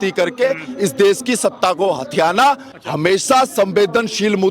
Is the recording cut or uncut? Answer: uncut